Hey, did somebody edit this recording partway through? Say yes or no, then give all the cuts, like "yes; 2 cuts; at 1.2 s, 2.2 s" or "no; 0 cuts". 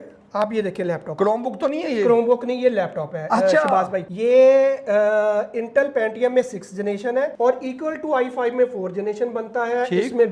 yes; 2 cuts; at 4.0 s, 7.3 s